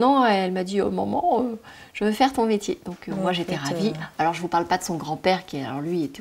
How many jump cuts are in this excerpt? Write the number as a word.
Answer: zero